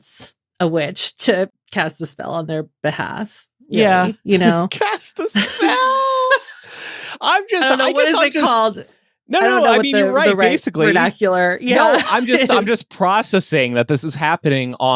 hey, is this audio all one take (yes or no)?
no